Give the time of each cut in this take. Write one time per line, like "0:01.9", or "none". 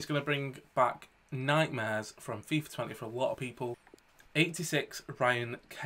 0:03.5